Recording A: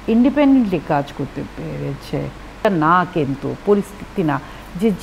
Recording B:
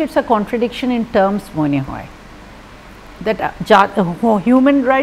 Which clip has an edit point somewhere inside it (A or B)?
A